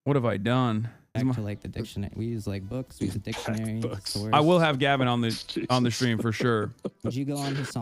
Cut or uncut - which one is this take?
cut